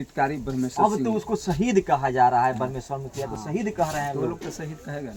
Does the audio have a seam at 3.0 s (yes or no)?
no